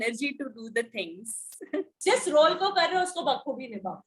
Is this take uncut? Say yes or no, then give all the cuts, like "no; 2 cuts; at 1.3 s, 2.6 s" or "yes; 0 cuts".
no; 1 cut; at 1.9 s